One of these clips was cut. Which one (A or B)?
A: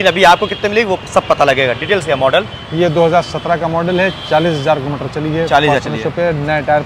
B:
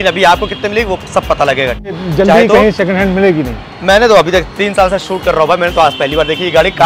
B